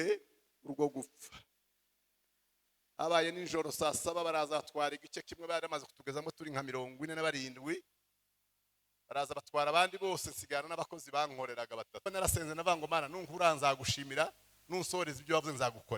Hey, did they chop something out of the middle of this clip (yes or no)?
yes